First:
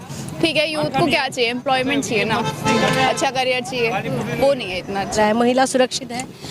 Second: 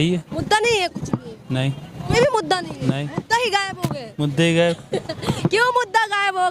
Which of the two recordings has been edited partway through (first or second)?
first